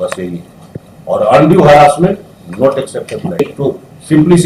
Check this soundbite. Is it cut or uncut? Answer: cut